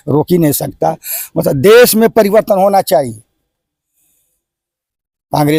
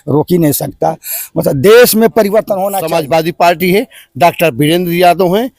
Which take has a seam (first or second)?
second